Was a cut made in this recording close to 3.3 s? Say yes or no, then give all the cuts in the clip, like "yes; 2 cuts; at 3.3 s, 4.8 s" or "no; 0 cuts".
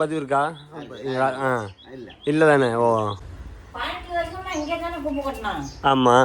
yes; 1 cut; at 3.3 s